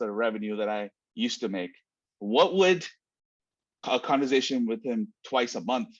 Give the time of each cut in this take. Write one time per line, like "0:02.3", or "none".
0:03.7